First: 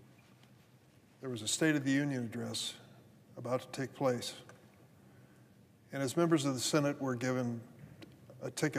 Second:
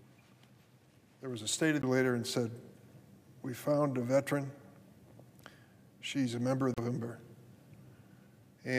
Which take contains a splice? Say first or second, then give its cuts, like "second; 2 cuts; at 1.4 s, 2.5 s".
first; 2 cuts; at 1.8 s, 6.9 s